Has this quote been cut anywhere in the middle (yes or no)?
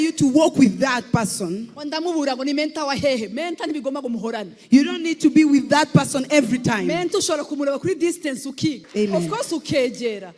yes